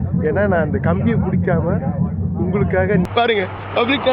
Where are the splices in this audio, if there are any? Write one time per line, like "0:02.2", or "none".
0:03.1